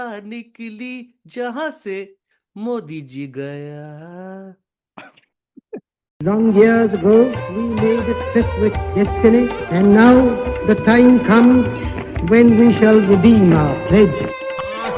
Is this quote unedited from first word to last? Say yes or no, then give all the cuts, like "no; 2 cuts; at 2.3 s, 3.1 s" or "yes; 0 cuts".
no; 1 cut; at 6.0 s